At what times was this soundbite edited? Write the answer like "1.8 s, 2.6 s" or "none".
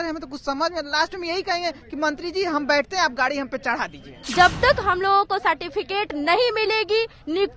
4.2 s